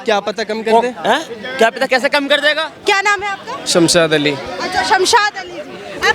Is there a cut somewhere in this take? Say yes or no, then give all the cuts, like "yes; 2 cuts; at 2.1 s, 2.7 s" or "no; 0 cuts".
yes; 1 cut; at 2.7 s